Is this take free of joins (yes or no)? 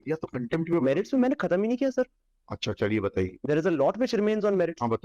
yes